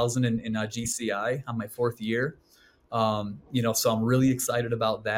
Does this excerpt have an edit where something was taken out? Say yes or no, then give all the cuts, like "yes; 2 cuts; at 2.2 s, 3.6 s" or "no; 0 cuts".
no; 0 cuts